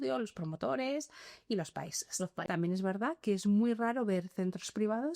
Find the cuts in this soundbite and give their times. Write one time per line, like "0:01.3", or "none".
0:02.4